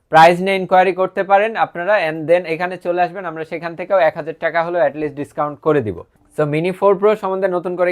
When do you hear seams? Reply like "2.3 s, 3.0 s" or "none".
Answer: 6.0 s

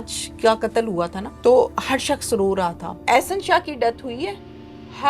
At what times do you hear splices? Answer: 1.2 s, 2.9 s

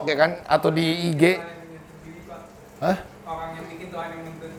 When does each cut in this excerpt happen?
none

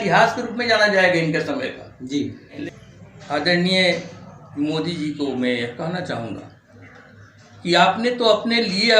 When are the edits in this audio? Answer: 2.6 s

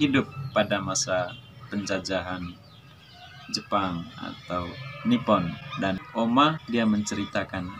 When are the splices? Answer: 6.6 s

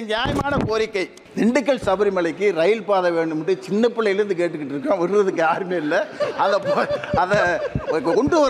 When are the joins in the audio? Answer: 1.2 s

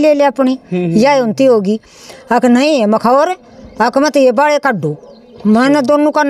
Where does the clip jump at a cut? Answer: none

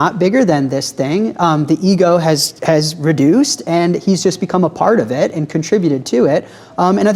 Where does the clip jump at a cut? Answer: none

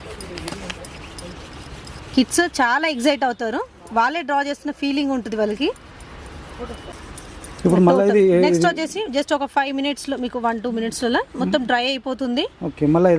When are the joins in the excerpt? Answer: 6.9 s

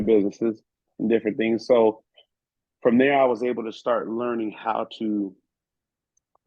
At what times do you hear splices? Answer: none

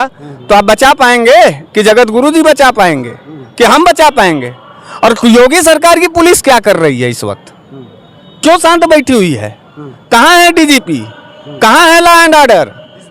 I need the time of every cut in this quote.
none

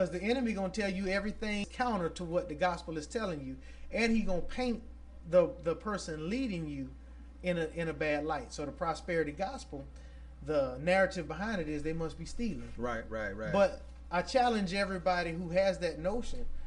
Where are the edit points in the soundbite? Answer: 1.6 s

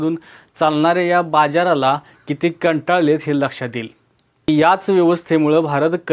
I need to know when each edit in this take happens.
4.5 s

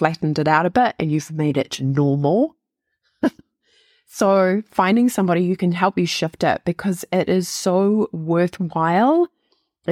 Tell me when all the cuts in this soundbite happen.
none

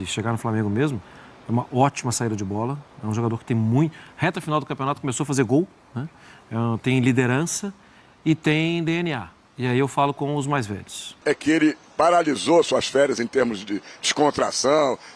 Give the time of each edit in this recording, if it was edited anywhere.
11.2 s

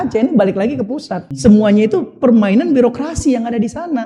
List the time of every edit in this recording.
1.2 s

